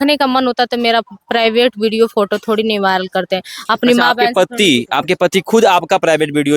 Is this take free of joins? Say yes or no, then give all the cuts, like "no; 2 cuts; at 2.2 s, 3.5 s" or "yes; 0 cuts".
yes; 0 cuts